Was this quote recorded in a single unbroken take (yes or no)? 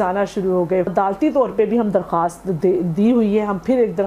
no